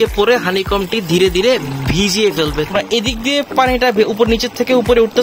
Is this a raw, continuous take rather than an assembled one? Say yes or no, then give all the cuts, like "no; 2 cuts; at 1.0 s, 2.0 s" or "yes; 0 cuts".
no; 1 cut; at 2.7 s